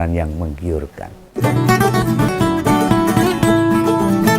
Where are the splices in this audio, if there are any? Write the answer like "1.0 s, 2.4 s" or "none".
1.2 s